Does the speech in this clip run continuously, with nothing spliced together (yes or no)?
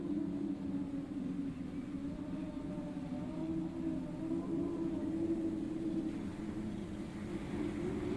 yes